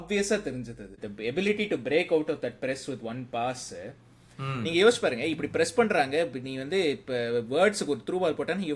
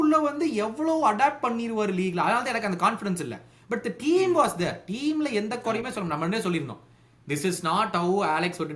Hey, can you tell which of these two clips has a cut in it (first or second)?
first